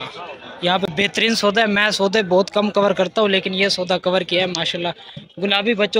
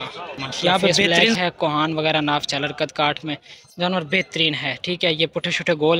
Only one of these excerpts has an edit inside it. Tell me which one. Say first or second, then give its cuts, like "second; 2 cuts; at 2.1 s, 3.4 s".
second; 1 cut; at 1.4 s